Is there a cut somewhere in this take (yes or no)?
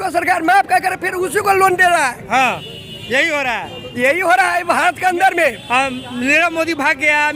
no